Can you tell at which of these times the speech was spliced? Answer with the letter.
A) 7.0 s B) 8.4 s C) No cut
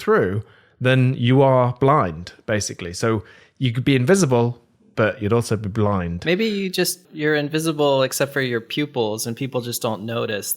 A